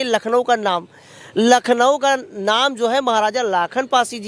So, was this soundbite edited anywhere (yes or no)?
no